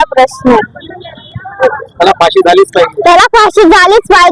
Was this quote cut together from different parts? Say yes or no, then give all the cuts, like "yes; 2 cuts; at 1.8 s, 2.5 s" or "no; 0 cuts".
no; 0 cuts